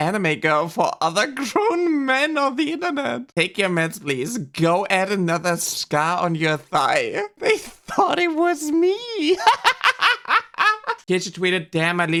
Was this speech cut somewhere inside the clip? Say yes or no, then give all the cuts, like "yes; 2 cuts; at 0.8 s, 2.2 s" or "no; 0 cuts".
no; 0 cuts